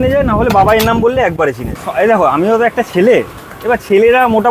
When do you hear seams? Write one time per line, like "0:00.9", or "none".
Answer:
0:01.8